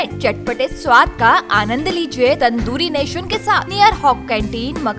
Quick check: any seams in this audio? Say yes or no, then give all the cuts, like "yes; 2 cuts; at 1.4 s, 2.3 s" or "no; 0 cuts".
yes; 2 cuts; at 2.4 s, 3.7 s